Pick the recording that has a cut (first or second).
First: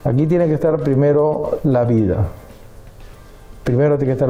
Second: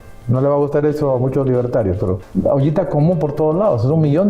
second